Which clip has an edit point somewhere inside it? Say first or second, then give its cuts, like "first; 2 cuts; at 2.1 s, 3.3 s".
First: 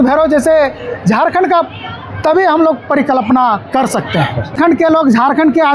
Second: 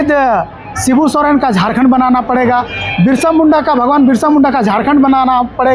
first; 1 cut; at 4.6 s